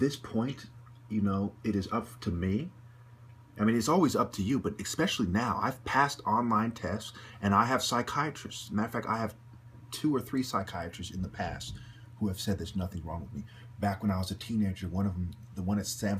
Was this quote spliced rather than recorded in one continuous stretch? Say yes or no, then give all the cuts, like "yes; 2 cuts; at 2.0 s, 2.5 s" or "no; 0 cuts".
yes; 1 cut; at 13.0 s